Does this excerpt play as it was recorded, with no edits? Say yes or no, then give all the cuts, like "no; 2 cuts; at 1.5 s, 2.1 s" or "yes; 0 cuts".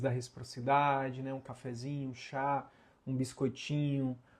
yes; 0 cuts